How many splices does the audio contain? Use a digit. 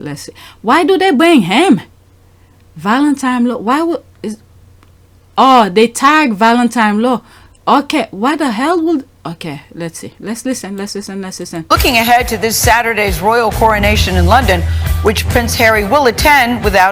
0